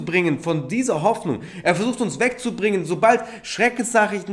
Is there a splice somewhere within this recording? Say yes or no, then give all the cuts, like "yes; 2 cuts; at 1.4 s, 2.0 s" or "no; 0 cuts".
no; 0 cuts